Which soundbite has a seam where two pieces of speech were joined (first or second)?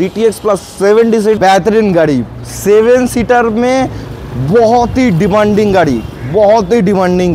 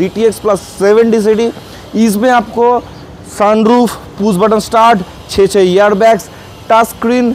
first